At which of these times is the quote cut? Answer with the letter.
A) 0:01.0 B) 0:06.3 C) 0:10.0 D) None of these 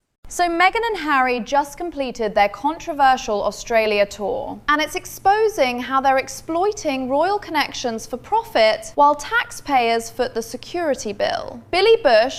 D